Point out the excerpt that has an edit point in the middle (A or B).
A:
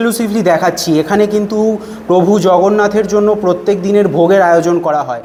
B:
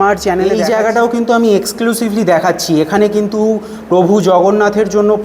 B